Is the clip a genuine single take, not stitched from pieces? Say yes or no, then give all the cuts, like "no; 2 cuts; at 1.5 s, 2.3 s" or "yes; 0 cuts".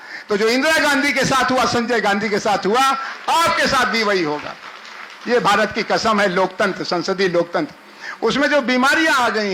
yes; 0 cuts